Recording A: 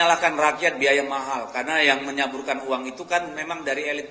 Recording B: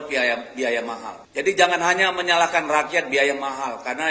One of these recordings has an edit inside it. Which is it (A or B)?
B